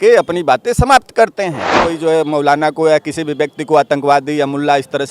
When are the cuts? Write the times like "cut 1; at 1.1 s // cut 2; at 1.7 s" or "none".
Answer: cut 1; at 1.9 s